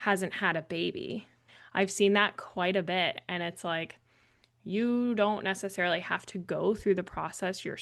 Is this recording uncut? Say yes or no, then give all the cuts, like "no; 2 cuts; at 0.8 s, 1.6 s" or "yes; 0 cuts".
no; 1 cut; at 1.6 s